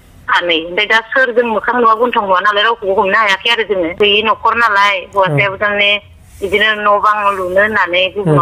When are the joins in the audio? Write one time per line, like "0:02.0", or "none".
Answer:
0:03.9